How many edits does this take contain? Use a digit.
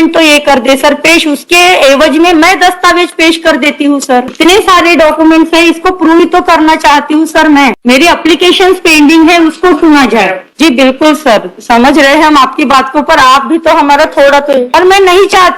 4